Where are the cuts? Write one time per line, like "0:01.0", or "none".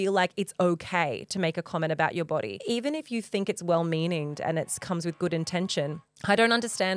0:02.6
0:06.1